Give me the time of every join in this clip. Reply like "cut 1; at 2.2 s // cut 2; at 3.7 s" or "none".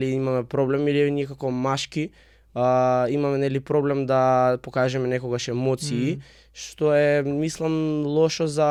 none